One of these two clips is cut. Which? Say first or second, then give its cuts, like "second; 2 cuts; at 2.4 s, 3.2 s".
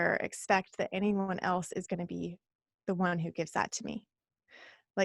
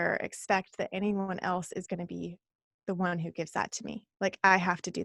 second; 1 cut; at 4.0 s